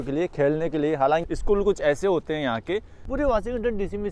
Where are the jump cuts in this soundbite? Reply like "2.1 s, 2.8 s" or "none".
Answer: 1.2 s, 3.0 s